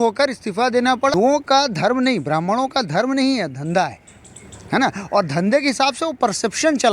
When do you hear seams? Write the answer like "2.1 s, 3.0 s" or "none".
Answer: 1.1 s